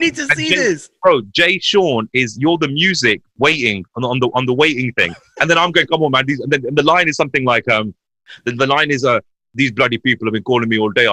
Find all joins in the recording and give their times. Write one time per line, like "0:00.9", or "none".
none